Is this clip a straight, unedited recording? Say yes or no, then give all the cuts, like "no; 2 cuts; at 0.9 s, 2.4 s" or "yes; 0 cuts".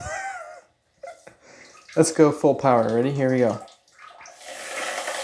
yes; 0 cuts